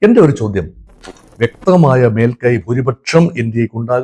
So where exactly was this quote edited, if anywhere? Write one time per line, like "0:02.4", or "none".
0:01.2